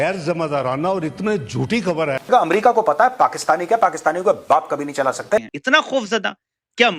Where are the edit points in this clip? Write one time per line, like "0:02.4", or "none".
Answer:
0:02.2
0:05.5